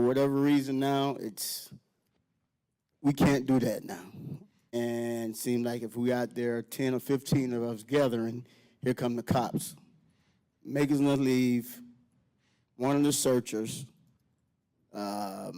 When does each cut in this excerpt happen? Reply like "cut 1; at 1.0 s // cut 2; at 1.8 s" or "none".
cut 1; at 4.7 s